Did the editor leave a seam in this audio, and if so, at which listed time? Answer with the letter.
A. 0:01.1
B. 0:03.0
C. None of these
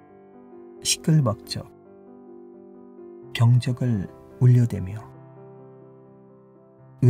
A